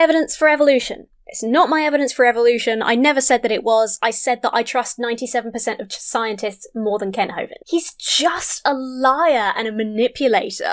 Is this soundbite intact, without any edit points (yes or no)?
yes